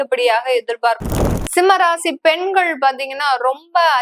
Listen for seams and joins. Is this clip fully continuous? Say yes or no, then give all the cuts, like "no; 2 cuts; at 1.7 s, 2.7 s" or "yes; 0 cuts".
no; 1 cut; at 1.2 s